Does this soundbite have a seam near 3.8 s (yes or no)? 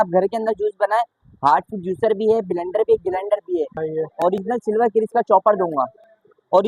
yes